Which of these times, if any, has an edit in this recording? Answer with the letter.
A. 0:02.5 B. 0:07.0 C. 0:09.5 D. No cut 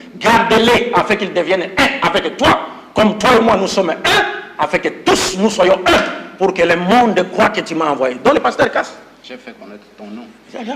D